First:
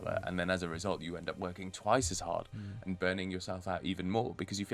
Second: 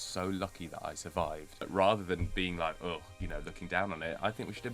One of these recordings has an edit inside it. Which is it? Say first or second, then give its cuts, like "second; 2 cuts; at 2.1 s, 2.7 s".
second; 1 cut; at 1.7 s